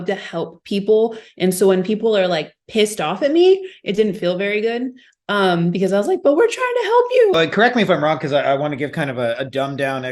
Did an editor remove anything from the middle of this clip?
yes; 1 cut; at 7.3 s

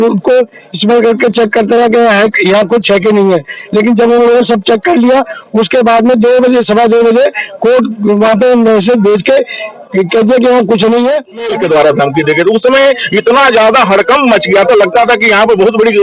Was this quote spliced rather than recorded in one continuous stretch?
yes; 1 cut; at 11.5 s

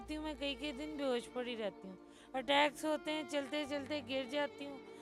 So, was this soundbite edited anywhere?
no; 0 cuts

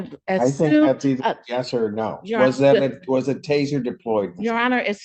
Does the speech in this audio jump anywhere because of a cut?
no; 0 cuts

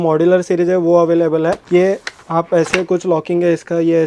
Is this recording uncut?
no; 1 cut; at 1.6 s

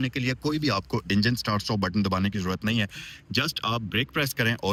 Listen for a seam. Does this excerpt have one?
no; 0 cuts

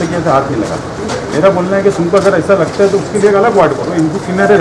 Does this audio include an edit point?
no; 0 cuts

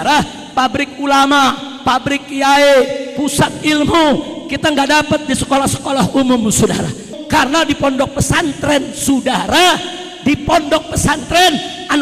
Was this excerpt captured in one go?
no; 1 cut; at 7.1 s

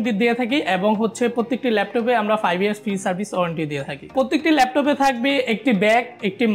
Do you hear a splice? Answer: yes; 1 cut; at 4.0 s

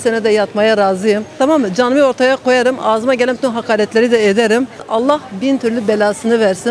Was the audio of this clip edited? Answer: yes; 2 cuts; at 1.3 s, 4.8 s

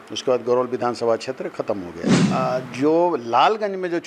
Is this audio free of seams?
yes; 0 cuts

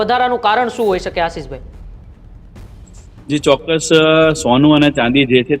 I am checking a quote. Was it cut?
no; 0 cuts

